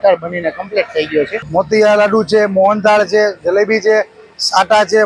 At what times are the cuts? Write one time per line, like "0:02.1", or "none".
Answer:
0:01.4